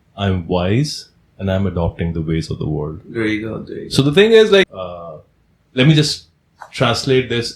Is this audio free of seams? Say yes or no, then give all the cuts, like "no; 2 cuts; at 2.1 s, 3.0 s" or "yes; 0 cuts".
no; 1 cut; at 4.7 s